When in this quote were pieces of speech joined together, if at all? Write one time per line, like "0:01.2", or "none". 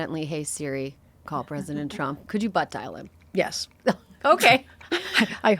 0:02.2